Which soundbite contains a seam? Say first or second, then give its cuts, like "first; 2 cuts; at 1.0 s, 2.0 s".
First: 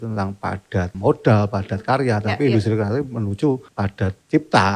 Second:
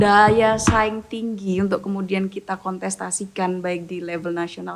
first; 2 cuts; at 0.9 s, 3.9 s